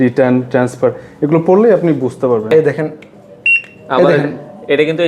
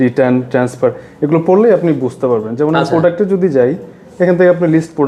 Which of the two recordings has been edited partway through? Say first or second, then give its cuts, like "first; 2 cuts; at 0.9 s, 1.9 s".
first; 1 cut; at 2.5 s